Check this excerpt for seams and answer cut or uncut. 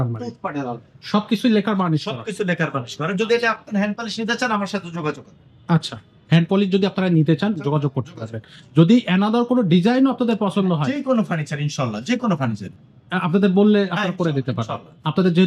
uncut